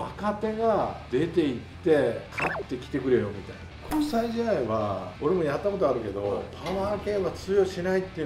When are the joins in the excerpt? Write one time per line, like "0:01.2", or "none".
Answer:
0:01.0
0:02.3
0:03.9
0:05.1